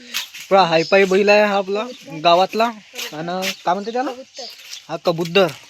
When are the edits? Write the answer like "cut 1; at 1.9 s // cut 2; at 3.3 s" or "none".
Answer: cut 1; at 3.0 s